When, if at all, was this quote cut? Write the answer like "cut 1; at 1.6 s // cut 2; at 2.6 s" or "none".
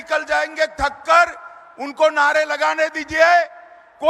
none